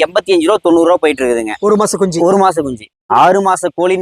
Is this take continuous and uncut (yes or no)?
no